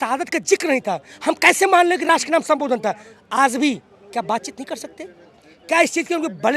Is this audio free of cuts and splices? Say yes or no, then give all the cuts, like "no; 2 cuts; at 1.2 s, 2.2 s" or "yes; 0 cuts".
yes; 0 cuts